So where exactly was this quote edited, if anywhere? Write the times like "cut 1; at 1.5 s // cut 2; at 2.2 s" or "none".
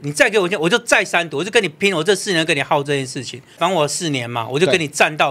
cut 1; at 3.6 s